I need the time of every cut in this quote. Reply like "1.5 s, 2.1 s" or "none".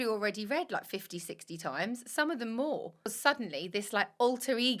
3.0 s